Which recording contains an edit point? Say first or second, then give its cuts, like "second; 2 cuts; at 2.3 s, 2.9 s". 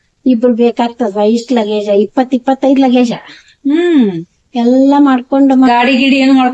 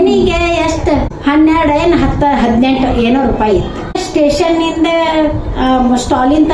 second; 2 cuts; at 1.1 s, 3.9 s